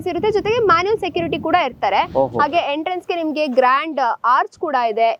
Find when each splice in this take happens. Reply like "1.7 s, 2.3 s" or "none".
none